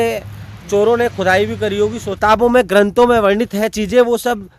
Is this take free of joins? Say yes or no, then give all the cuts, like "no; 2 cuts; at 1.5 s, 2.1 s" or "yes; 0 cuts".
no; 1 cut; at 2.1 s